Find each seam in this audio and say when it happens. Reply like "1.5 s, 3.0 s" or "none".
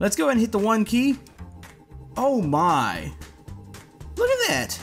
none

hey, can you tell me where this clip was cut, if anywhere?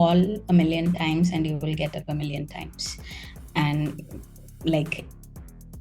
none

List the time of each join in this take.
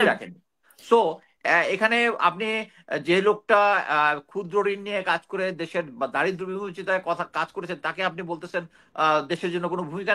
none

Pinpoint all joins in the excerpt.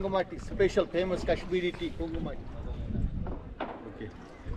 2.2 s

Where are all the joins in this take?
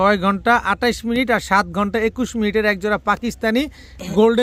none

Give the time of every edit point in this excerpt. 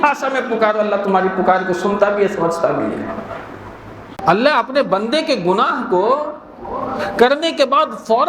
4.2 s

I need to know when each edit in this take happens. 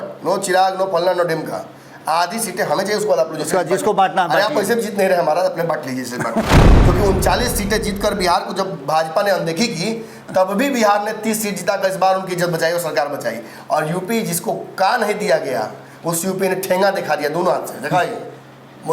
6.5 s

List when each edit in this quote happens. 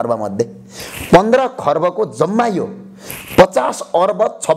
none

